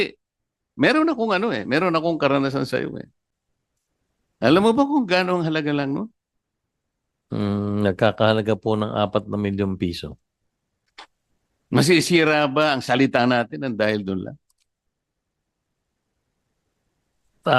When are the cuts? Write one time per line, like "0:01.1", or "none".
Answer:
0:03.2